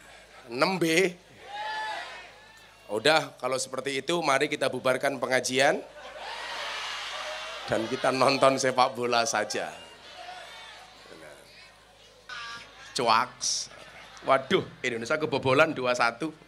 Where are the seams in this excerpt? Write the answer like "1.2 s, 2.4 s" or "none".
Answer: 12.3 s